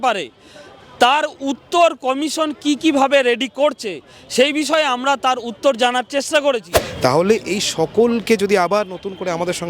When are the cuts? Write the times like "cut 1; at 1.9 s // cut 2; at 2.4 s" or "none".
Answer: cut 1; at 6.8 s